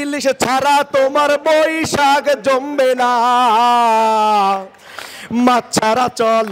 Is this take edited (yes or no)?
no